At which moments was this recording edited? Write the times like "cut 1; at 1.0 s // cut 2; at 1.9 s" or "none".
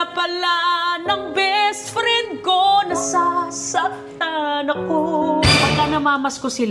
cut 1; at 5.5 s